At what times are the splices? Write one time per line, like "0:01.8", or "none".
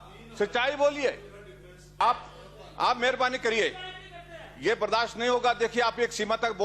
0:02.0